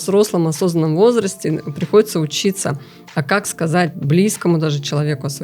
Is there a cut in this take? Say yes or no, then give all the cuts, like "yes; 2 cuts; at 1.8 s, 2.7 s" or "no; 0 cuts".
no; 0 cuts